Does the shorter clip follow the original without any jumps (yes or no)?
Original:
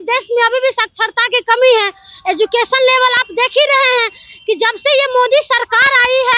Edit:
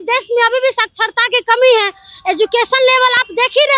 yes